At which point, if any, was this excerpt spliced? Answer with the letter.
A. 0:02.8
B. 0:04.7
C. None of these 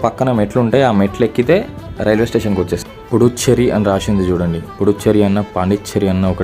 A